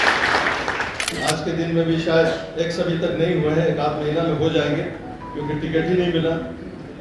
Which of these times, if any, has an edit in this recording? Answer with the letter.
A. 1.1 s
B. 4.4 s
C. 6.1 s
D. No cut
A